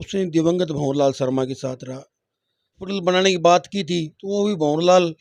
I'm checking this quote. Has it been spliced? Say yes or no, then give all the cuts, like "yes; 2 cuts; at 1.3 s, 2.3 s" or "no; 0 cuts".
yes; 1 cut; at 2.8 s